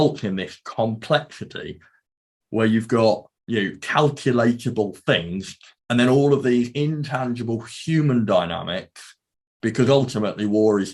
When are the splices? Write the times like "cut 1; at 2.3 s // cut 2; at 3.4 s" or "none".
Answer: cut 1; at 2.0 s // cut 2; at 3.3 s // cut 3; at 5.7 s